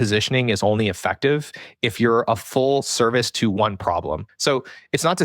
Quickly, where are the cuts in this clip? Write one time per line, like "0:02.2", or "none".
0:04.3